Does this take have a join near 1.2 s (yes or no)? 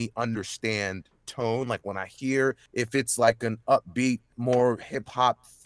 no